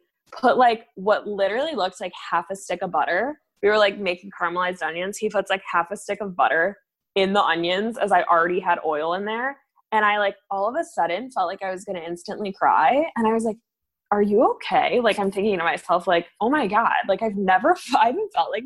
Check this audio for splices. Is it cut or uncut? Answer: uncut